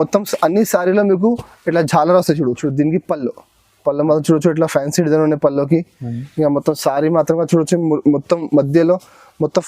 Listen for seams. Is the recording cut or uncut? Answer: cut